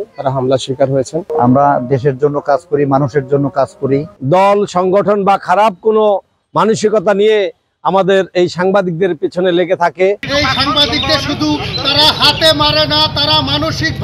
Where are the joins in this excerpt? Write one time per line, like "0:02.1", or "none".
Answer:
0:01.3
0:04.1
0:10.3